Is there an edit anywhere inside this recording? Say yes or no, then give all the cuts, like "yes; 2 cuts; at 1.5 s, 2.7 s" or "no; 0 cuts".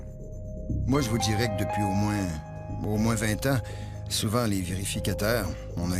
no; 0 cuts